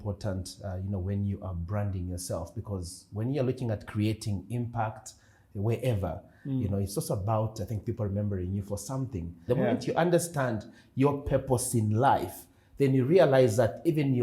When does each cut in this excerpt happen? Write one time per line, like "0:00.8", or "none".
0:09.4